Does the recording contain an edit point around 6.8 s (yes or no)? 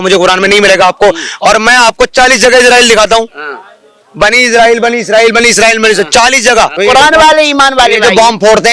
yes